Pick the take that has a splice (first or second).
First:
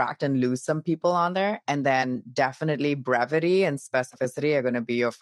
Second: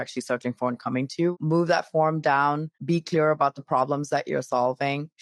second